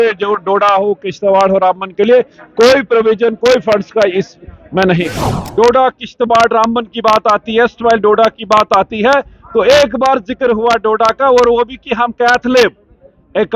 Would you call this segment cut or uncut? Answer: cut